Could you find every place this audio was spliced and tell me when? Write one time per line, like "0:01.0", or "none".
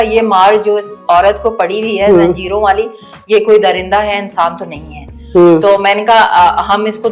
none